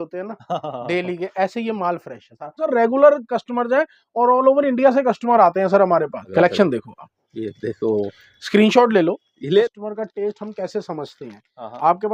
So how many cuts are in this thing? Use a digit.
3